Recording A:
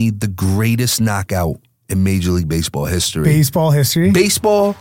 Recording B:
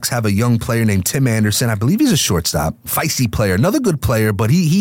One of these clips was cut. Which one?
B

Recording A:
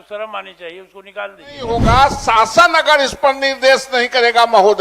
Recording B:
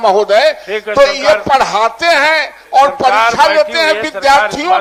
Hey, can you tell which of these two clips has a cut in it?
A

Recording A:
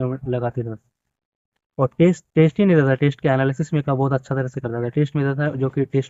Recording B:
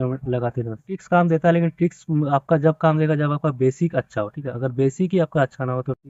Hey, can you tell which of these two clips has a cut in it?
B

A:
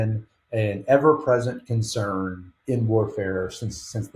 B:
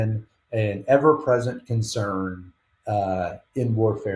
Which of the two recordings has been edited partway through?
A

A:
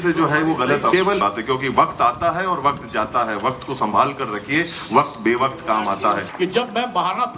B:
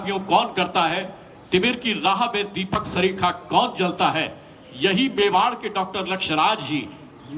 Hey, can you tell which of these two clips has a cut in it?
A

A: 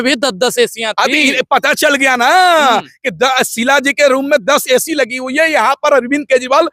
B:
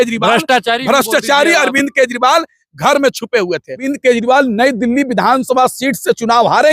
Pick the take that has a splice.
B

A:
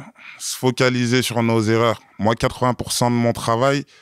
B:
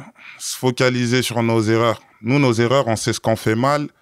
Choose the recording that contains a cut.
A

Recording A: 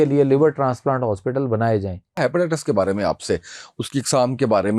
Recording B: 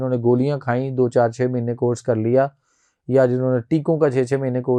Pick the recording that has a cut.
A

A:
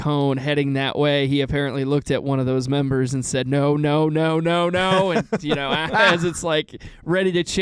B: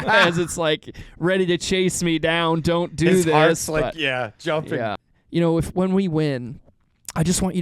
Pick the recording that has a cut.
B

